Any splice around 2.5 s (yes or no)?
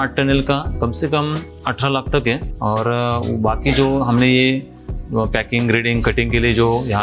yes